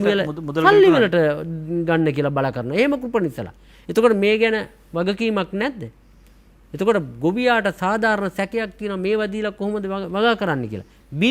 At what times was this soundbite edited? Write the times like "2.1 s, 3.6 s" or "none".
none